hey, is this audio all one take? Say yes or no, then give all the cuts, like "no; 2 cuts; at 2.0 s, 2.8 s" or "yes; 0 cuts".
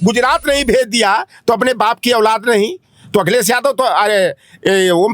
yes; 0 cuts